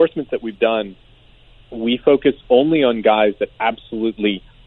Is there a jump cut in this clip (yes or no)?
no